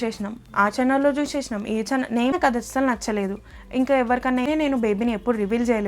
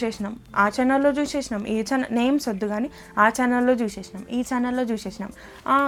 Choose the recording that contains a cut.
first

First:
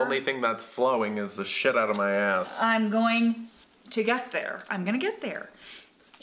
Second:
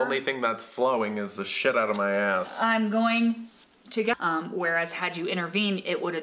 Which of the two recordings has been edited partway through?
second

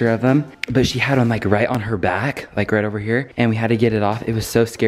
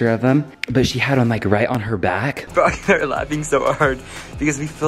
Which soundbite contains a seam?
second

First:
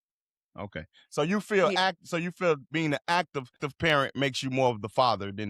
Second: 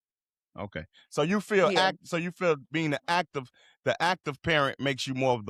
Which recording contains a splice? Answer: first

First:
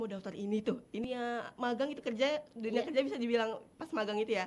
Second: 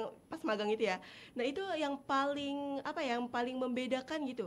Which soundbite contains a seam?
first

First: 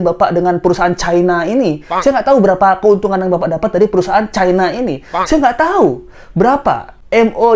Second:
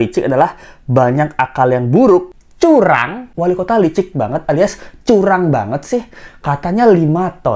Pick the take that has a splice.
second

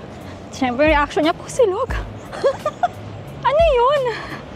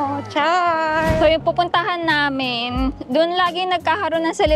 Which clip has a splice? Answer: second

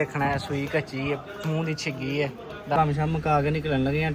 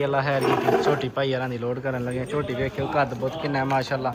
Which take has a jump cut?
first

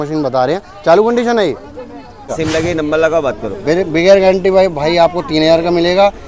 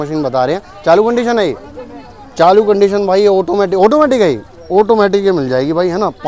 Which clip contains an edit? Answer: first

